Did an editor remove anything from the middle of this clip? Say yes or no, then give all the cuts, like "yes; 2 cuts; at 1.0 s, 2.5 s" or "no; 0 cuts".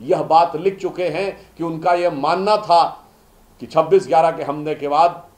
no; 0 cuts